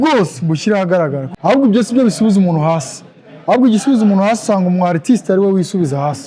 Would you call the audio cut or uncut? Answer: cut